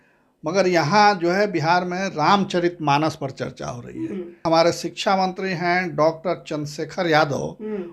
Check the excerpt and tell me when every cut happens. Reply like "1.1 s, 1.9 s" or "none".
4.4 s